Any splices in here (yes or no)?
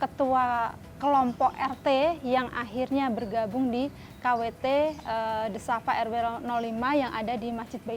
no